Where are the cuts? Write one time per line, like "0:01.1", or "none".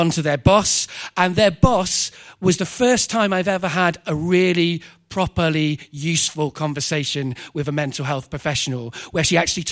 none